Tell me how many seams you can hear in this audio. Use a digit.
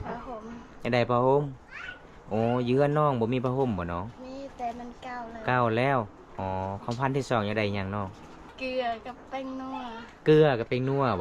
2